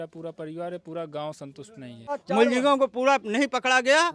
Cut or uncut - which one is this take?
cut